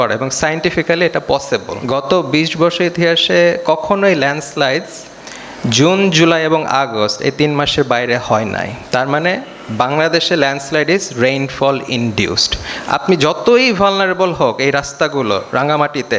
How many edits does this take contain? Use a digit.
1